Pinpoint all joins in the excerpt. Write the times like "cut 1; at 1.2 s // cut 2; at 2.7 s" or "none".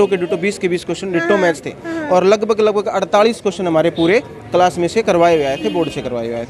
none